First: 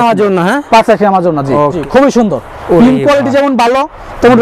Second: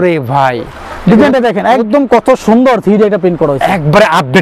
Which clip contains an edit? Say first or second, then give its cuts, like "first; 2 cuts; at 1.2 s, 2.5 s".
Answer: first; 1 cut; at 1.8 s